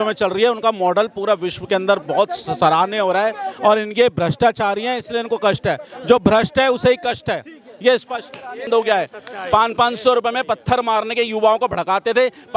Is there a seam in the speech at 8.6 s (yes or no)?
yes